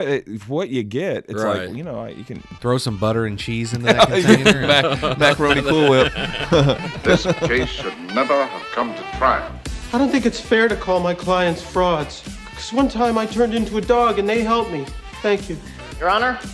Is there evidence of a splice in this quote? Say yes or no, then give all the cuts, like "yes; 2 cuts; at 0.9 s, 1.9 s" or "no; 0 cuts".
yes; 2 cuts; at 2.5 s, 7.5 s